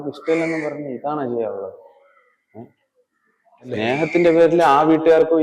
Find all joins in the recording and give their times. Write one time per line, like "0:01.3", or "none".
none